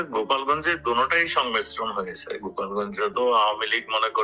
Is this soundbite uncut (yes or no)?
yes